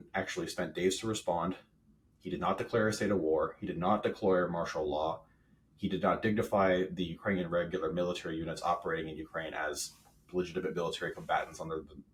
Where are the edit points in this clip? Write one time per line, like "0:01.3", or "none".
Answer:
none